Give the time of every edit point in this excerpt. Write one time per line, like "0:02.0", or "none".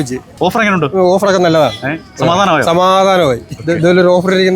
none